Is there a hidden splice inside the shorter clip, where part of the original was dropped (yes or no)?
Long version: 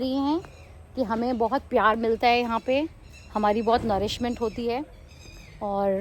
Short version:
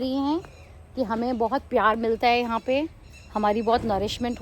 no